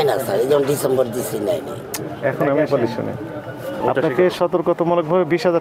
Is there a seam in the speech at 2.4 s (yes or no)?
no